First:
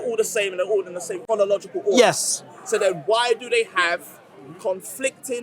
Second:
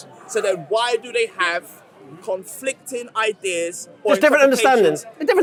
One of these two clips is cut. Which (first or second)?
first